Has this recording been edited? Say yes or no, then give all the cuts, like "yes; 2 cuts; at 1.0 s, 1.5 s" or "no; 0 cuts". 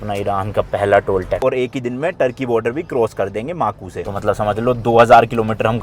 yes; 2 cuts; at 1.4 s, 3.8 s